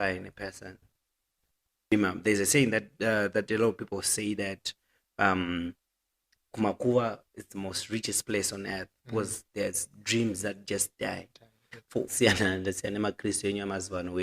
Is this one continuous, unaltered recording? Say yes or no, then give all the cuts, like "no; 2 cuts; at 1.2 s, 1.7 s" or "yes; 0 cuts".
no; 2 cuts; at 1.9 s, 12.1 s